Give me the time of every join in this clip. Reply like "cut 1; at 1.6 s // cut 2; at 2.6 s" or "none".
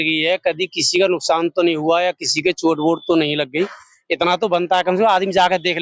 none

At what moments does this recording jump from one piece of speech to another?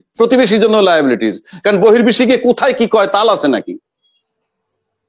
none

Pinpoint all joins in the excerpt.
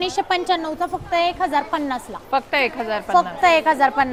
none

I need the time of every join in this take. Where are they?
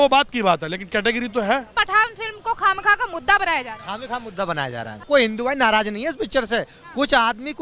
cut 1; at 1.7 s // cut 2; at 5.1 s

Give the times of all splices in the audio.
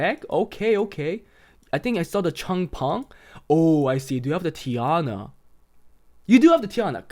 none

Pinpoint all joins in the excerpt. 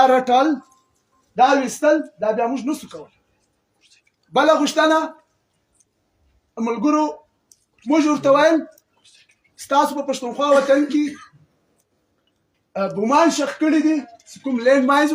none

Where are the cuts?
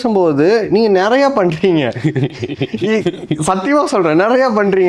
none

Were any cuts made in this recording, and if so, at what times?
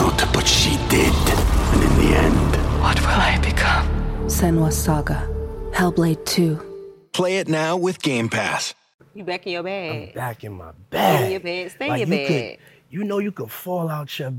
cut 1; at 8.9 s

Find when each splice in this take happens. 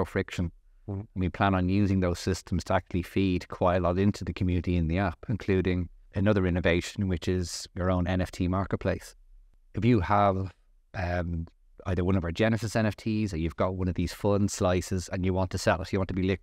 none

